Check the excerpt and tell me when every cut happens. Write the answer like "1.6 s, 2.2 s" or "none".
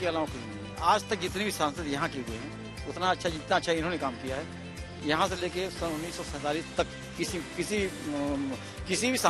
none